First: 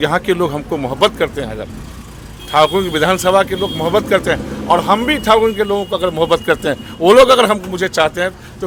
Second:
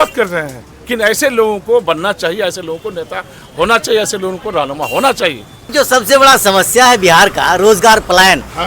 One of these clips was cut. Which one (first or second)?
second